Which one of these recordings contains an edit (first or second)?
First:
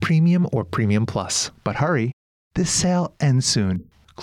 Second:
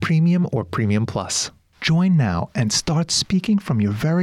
second